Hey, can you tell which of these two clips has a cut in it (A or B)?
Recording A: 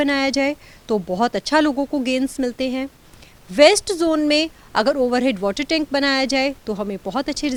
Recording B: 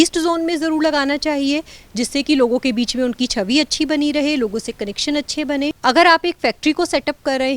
B